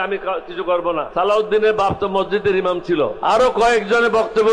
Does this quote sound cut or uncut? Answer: cut